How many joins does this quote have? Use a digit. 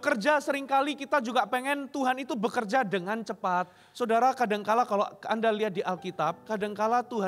2